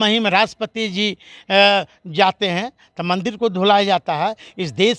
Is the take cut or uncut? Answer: uncut